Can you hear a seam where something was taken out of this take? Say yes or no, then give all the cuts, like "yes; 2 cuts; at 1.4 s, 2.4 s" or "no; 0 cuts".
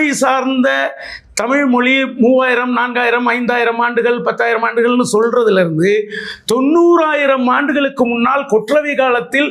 no; 0 cuts